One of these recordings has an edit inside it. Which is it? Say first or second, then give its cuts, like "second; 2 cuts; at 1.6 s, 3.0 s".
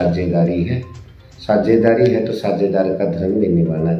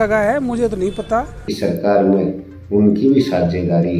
second; 1 cut; at 1.4 s